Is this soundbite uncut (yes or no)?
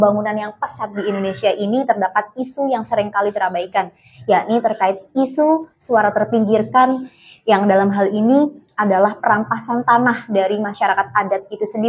yes